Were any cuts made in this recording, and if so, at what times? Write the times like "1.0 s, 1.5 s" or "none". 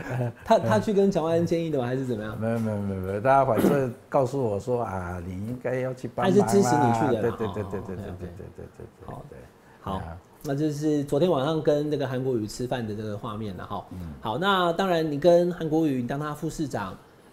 none